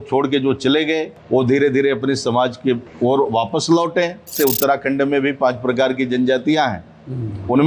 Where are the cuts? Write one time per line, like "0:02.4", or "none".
0:01.1
0:02.9
0:04.3

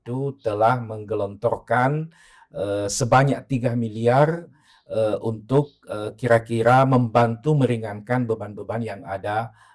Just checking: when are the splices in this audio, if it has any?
none

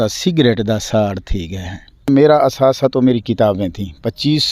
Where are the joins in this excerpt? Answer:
0:02.1

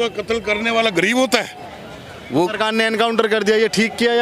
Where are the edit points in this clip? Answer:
0:01.6

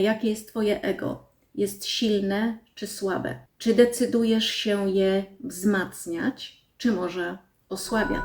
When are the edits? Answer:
0:03.5

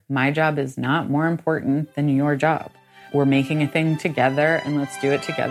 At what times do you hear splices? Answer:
0:03.0

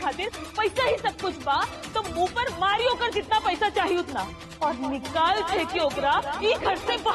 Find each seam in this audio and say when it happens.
none

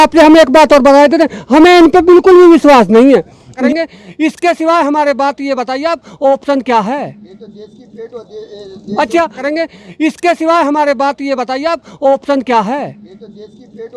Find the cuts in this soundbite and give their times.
0:03.7
0:09.4

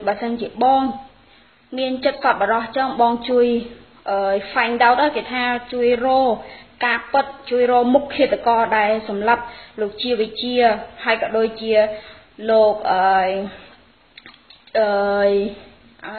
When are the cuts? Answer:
0:08.1

